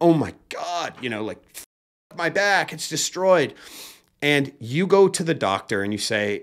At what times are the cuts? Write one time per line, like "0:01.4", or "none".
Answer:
none